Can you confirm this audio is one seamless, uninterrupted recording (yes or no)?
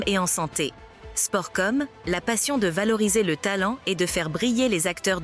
yes